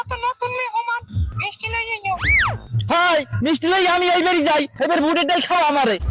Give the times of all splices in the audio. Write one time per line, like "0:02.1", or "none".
0:01.3